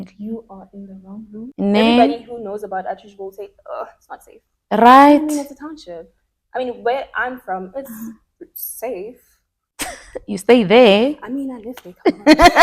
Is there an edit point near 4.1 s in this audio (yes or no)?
no